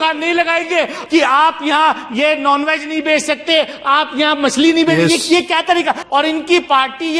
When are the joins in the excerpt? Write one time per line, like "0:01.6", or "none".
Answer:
0:01.0
0:06.0